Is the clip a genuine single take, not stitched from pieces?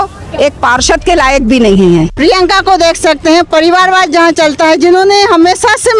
no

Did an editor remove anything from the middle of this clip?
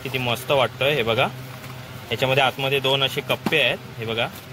no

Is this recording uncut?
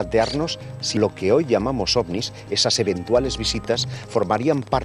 no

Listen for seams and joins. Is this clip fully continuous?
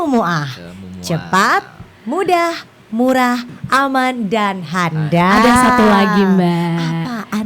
yes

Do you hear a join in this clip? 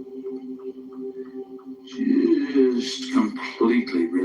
yes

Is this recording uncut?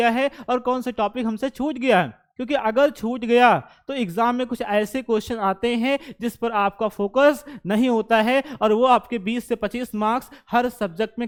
yes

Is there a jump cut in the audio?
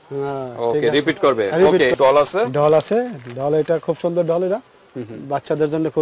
yes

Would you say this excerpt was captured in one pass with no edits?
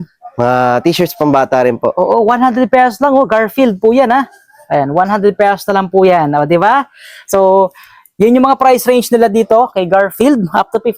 yes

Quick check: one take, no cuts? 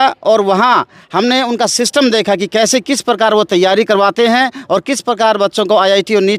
yes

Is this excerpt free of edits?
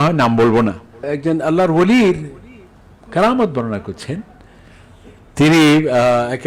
no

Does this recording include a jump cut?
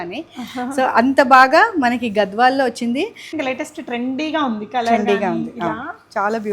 yes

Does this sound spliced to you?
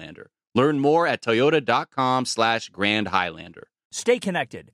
yes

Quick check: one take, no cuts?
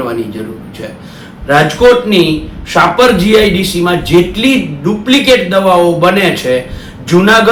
yes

